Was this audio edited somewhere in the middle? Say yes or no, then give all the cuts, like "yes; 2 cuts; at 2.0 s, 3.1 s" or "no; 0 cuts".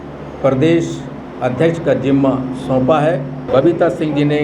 yes; 1 cut; at 3.4 s